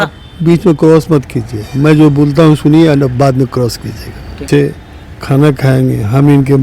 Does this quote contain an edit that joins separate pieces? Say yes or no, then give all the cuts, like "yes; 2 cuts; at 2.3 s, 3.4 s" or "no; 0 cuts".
yes; 1 cut; at 4.5 s